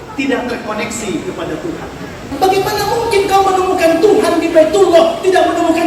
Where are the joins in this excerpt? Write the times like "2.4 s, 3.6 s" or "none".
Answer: 2.3 s